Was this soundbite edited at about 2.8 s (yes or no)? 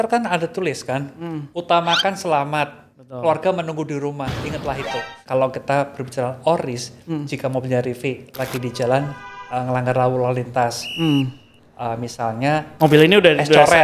no